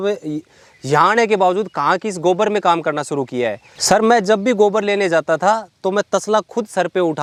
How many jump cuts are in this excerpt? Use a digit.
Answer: 0